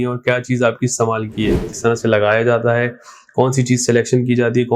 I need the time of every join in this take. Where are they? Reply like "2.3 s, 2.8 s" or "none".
1.7 s